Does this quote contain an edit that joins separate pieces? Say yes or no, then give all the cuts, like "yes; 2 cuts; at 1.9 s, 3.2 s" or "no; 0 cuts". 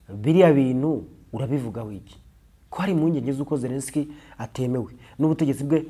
no; 0 cuts